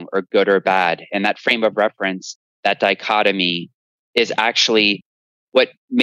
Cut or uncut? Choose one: uncut